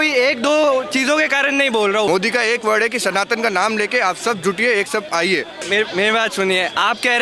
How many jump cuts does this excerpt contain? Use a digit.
2